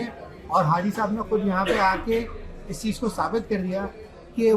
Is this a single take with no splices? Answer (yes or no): yes